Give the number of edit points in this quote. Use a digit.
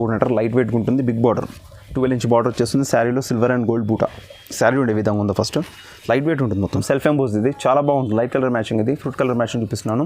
1